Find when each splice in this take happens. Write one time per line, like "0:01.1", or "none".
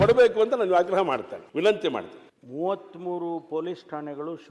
none

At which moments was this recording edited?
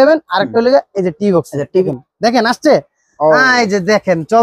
0:01.8

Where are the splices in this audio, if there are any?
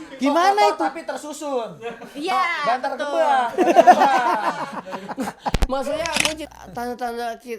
0:06.4

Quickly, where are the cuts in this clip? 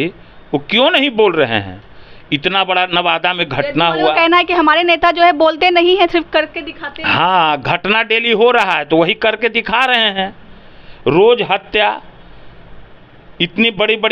none

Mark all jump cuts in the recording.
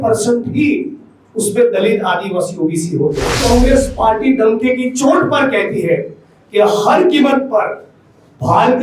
0:03.4

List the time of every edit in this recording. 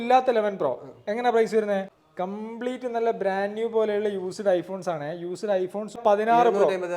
0:02.0
0:06.0

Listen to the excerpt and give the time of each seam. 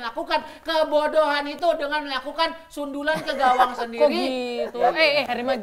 none

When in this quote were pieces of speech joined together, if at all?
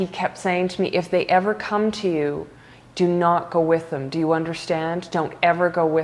none

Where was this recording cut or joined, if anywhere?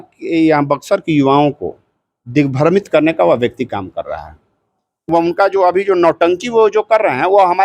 0:05.0

